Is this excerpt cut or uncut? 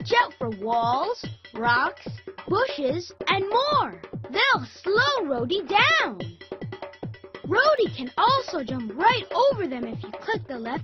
cut